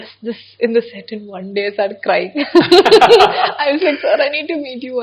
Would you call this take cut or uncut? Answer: uncut